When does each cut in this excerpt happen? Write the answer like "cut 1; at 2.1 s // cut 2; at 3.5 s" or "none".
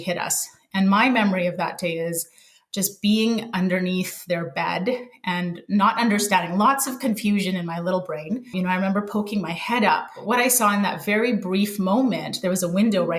cut 1; at 8.5 s // cut 2; at 10.1 s